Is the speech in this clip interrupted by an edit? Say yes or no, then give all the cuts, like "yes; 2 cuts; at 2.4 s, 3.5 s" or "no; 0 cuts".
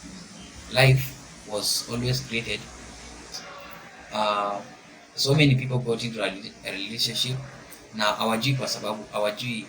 yes; 1 cut; at 3.4 s